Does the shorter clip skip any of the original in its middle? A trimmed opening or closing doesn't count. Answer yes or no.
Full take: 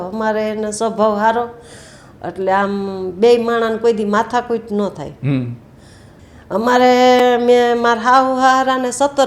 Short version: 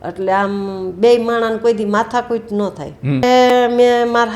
yes